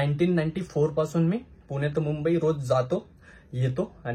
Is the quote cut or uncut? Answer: uncut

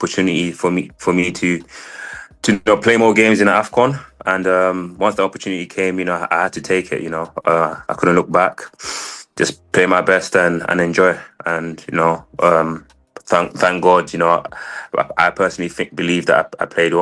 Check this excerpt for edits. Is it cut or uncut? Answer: uncut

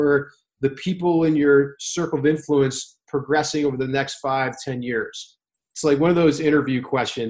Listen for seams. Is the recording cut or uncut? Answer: uncut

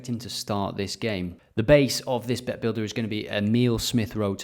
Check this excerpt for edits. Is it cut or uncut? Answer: cut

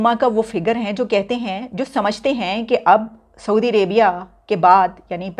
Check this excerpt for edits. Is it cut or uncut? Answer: uncut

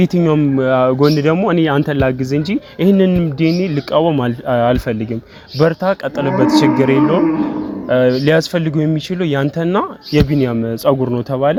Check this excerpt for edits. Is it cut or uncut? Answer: uncut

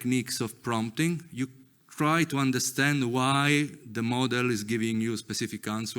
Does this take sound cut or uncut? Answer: uncut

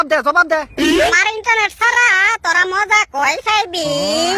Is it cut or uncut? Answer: cut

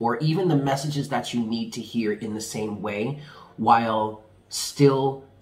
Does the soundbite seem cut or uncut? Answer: uncut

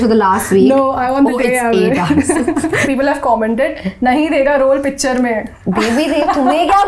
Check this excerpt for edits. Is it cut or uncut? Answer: cut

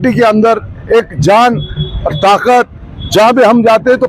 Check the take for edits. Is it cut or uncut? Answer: uncut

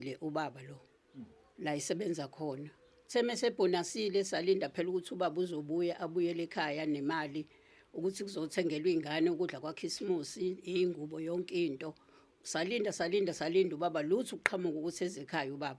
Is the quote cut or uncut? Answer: uncut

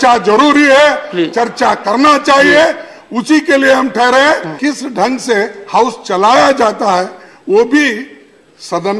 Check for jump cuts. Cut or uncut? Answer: cut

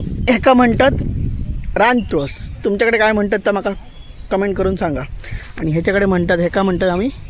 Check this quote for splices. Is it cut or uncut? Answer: uncut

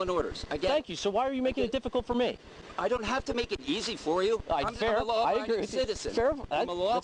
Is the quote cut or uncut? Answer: uncut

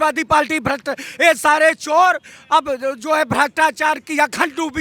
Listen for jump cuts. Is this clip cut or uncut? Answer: uncut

